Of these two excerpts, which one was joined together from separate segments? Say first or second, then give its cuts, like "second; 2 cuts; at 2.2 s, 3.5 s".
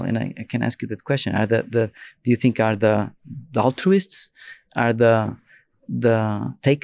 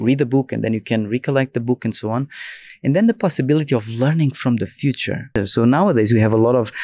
second; 1 cut; at 5.4 s